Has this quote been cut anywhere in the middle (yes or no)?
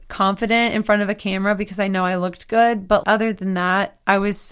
yes